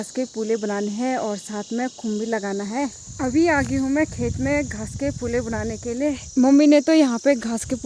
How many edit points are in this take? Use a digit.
0